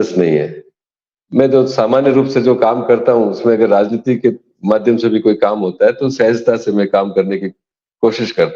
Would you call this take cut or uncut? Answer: uncut